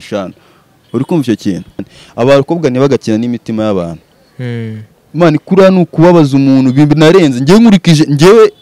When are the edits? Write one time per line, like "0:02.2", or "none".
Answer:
0:01.9